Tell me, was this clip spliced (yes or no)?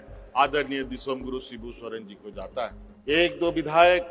yes